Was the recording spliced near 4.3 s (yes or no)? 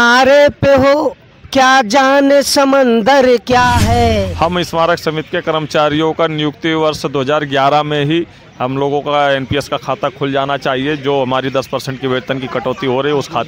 yes